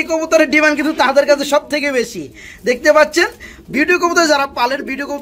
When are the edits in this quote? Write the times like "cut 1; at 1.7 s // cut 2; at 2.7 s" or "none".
none